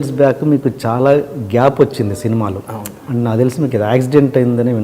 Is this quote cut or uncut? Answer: uncut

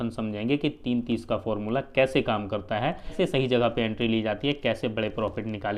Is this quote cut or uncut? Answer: cut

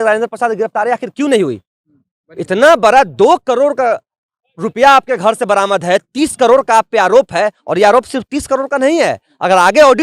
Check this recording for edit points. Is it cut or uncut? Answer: uncut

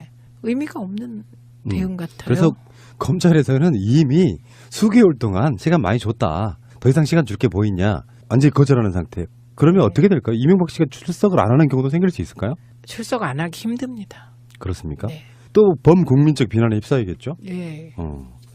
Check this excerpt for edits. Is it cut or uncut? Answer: cut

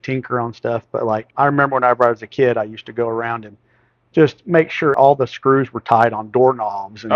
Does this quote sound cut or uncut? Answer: cut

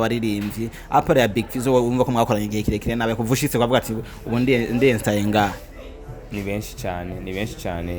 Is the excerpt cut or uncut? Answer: uncut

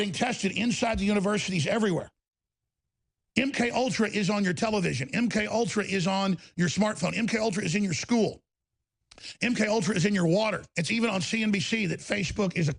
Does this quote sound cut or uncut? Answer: cut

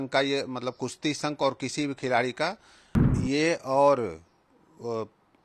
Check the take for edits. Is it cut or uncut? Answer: cut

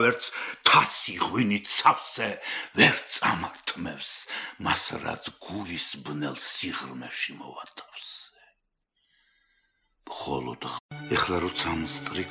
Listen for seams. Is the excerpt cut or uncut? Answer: uncut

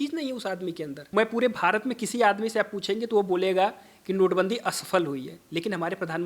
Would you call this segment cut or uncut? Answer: cut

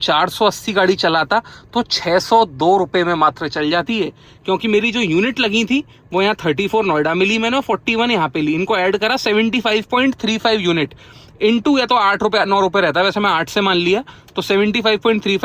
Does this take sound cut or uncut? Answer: uncut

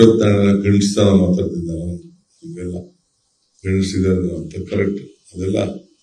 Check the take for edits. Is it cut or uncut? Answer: cut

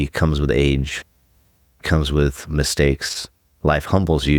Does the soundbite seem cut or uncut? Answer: cut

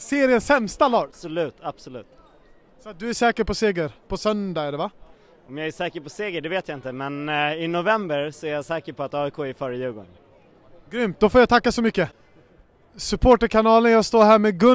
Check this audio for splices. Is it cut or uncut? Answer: uncut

